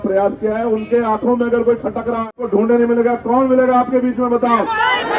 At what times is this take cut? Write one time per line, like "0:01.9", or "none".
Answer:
0:02.4